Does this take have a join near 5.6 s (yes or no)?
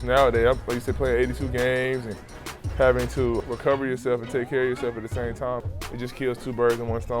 yes